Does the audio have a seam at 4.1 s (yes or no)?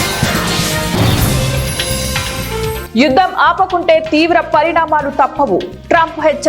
no